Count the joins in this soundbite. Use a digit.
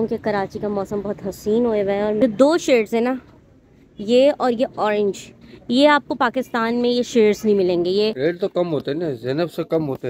2